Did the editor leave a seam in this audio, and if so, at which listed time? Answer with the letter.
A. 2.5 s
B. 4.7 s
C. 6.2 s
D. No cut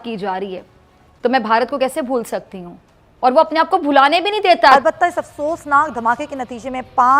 B